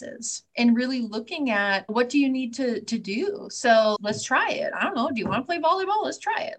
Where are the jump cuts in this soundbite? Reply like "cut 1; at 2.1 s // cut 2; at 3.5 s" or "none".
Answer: cut 1; at 4.0 s